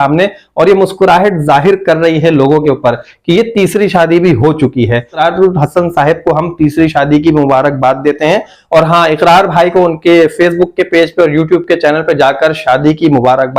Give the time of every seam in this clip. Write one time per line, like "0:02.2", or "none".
0:05.2
0:08.5